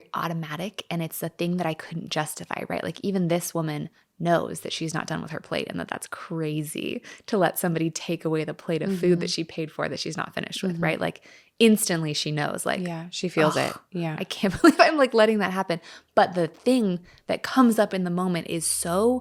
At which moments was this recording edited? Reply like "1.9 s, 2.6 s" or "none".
none